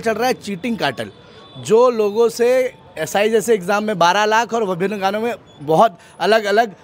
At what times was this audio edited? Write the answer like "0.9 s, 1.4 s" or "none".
none